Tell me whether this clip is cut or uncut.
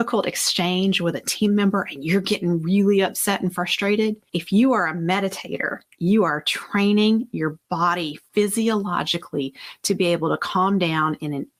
uncut